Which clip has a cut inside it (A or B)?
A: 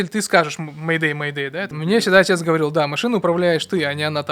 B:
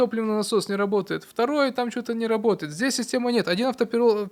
A